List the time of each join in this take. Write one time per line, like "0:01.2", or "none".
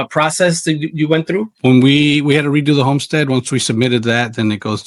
none